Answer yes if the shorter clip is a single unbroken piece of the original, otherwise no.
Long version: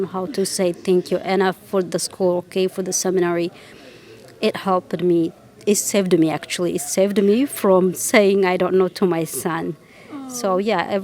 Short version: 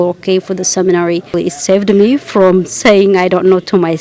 no